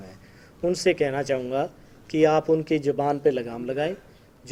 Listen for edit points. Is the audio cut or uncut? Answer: uncut